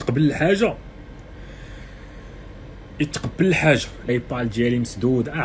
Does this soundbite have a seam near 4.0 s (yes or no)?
yes